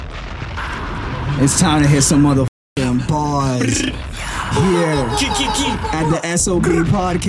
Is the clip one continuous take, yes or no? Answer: yes